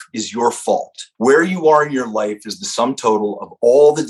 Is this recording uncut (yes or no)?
no